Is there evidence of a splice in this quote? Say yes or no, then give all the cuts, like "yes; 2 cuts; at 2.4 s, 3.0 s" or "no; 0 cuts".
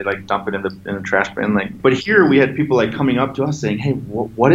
yes; 1 cut; at 1.7 s